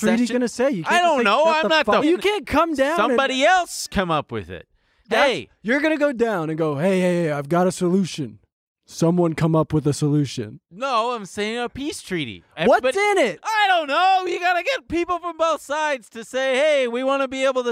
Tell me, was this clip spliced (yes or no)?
yes